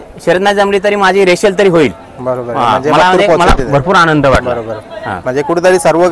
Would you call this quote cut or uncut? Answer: uncut